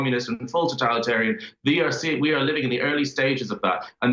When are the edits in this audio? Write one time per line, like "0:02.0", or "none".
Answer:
none